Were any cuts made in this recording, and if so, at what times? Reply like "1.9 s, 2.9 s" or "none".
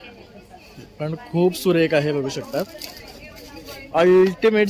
none